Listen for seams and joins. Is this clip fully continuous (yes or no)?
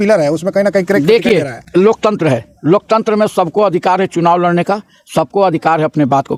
yes